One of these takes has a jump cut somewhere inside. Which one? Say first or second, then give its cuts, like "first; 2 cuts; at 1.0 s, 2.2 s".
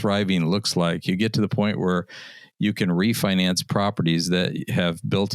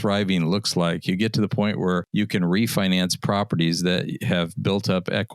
second; 1 cut; at 2.1 s